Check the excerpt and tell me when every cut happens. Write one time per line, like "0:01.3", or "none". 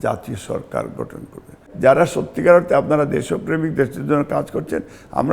0:01.6